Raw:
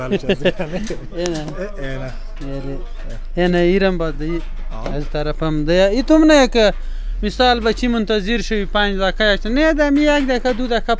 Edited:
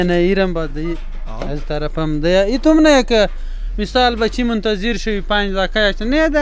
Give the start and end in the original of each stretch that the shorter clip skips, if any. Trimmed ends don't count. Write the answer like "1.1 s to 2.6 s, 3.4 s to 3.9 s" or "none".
none